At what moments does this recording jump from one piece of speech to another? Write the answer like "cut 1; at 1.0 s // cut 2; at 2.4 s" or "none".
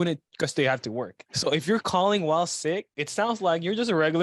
cut 1; at 1.2 s // cut 2; at 3.0 s

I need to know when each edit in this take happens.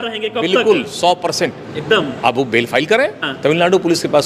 cut 1; at 3.2 s

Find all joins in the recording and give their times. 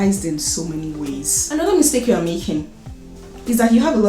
cut 1; at 1.4 s

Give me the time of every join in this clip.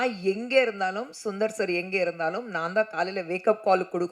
none

